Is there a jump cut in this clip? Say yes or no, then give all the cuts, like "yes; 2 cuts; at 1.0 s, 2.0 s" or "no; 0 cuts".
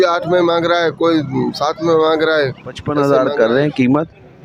yes; 1 cut; at 2.9 s